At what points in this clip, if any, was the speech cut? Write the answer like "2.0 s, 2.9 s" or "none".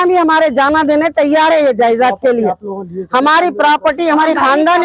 none